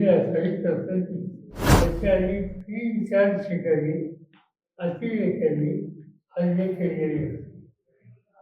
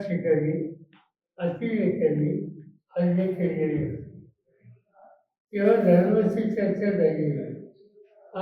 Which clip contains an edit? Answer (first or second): first